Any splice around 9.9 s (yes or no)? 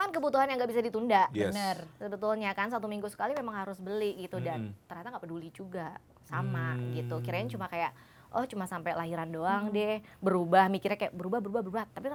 no